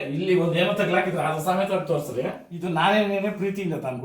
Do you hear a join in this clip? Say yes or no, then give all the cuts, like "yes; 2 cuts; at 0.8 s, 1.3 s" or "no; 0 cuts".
yes; 1 cut; at 2.5 s